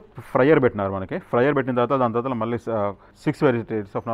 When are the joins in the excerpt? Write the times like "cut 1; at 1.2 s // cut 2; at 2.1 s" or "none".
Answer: cut 1; at 3.1 s